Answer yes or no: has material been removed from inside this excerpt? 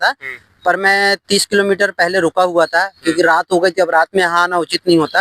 no